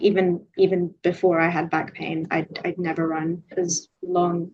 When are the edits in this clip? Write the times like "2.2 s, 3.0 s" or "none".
3.4 s